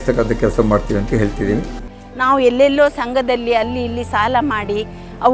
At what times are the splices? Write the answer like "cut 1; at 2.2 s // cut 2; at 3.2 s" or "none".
cut 1; at 1.8 s